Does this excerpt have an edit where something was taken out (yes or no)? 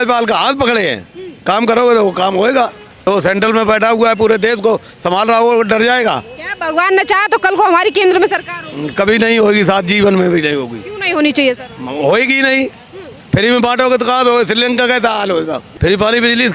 yes